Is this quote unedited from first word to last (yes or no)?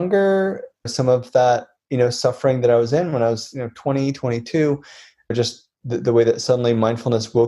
no